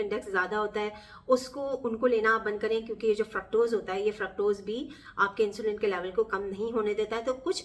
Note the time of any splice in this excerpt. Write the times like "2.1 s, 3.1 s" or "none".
none